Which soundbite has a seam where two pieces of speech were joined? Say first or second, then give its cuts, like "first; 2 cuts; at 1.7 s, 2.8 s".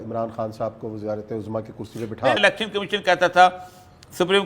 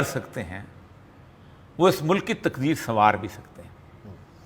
first; 1 cut; at 2.4 s